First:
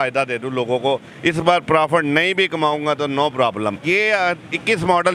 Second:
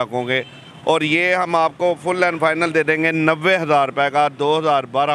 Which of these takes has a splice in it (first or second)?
first